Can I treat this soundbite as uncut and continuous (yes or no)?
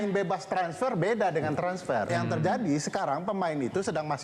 no